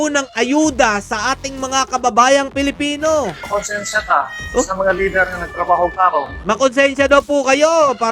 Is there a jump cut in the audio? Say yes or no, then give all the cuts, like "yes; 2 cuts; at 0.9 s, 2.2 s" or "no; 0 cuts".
yes; 2 cuts; at 3.4 s, 6.3 s